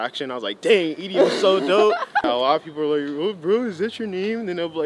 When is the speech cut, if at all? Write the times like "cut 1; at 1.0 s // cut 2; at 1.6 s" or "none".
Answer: cut 1; at 2.2 s